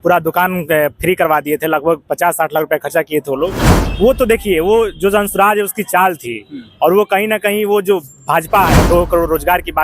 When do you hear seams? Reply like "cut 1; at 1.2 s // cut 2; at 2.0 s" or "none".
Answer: cut 1; at 3.7 s // cut 2; at 8.8 s